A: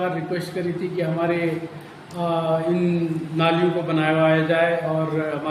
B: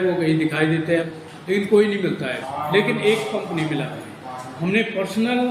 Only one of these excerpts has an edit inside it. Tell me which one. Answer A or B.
B